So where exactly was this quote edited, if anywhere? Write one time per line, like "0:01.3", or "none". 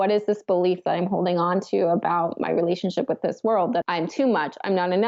0:03.8